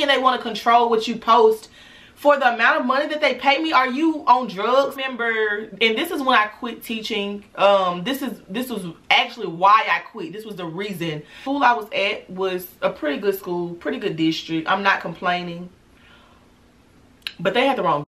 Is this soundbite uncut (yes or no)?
no